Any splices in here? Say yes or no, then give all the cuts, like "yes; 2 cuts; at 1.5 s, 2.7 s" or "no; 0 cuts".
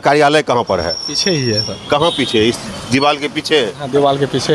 yes; 1 cut; at 1.7 s